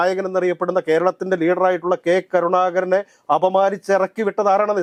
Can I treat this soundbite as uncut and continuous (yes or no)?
yes